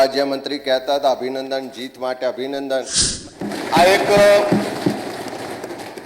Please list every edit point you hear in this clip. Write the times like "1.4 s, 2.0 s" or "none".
3.2 s